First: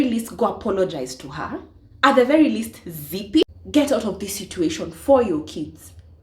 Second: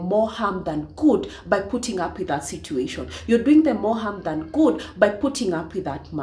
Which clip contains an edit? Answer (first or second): first